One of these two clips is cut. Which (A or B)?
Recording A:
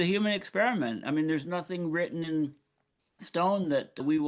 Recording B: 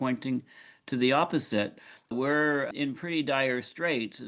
B